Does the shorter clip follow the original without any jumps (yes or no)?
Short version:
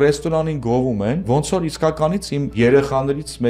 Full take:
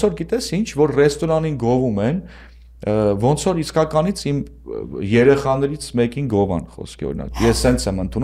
no